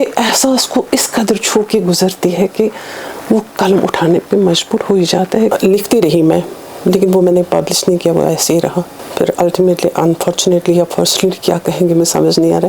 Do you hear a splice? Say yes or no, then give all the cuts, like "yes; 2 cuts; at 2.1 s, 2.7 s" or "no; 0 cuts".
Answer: yes; 2 cuts; at 5.5 s, 9.0 s